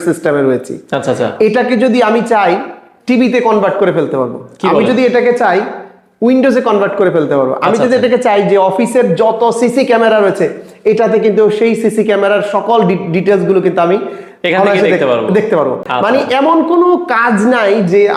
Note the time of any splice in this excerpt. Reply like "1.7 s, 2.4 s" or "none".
none

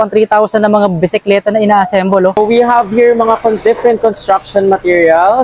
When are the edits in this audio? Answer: 2.4 s

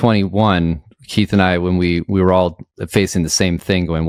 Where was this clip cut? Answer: none

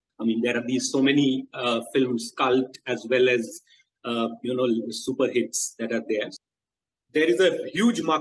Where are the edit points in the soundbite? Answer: 6.3 s

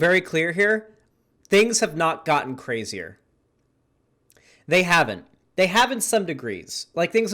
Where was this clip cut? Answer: 1.0 s

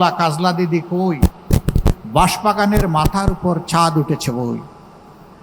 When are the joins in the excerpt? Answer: none

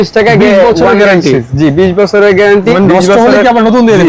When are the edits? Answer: 2.7 s

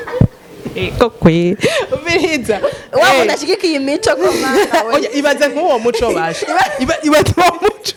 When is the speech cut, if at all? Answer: none

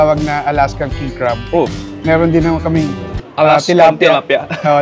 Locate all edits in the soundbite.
none

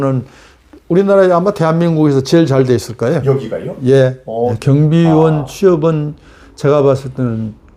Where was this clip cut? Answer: 4.6 s

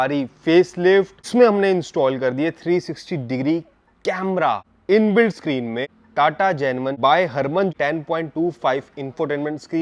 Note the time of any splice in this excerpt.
1.3 s, 4.7 s, 5.9 s, 7.0 s, 7.7 s

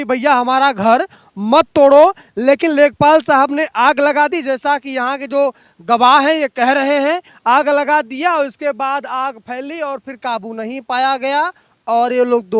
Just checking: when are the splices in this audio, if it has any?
none

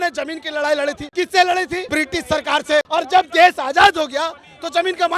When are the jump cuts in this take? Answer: 1.0 s, 1.8 s, 2.9 s

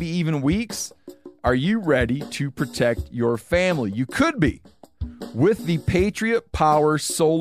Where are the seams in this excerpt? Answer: none

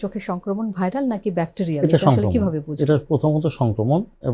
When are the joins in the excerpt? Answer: none

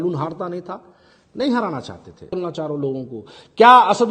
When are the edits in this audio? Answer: 2.3 s

